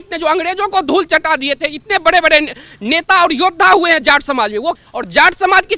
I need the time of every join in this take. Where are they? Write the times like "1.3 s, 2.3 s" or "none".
4.8 s